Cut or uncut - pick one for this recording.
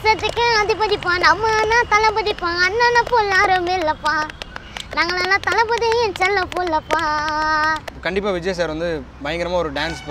cut